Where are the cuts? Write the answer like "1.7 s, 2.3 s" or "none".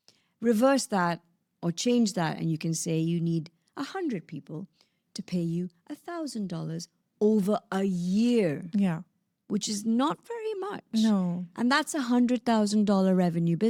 none

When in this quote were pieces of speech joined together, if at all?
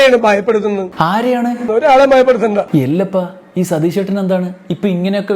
0.9 s

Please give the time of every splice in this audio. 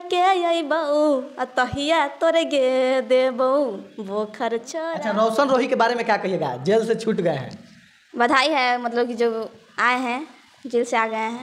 4.8 s

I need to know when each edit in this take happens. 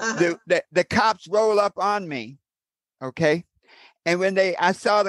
none

